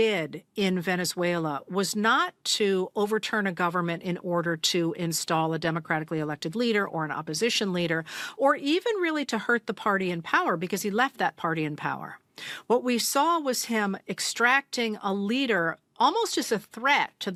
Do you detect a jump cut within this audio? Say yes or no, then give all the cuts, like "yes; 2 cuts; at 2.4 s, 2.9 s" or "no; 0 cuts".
no; 0 cuts